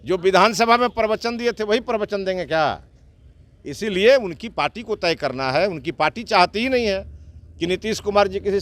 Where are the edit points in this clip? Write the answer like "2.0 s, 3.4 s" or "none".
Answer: none